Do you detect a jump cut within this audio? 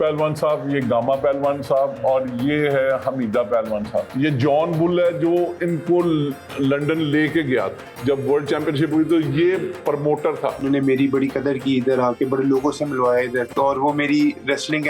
yes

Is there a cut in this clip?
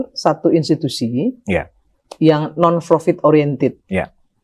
yes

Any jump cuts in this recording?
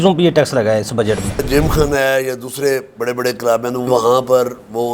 yes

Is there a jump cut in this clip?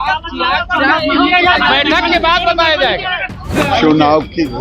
yes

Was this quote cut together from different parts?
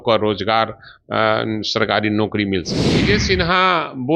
yes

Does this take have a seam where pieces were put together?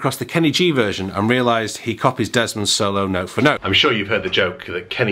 yes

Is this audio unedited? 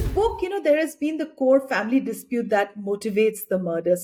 yes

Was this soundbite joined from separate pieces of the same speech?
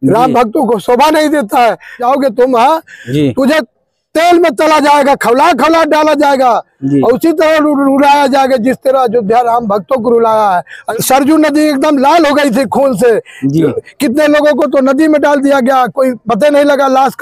yes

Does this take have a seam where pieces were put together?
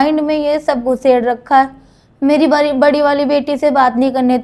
no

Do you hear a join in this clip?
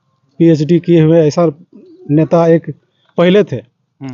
no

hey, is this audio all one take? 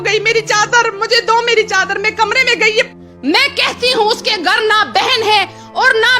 no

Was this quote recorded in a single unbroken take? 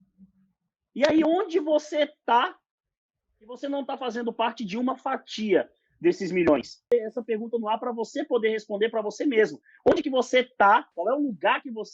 no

